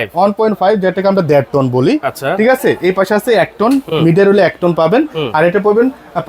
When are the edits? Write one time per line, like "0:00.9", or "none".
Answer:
none